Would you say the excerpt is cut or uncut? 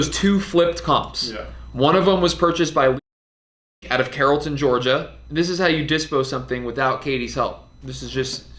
uncut